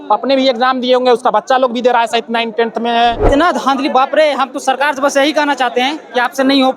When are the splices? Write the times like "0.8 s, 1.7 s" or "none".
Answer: 3.2 s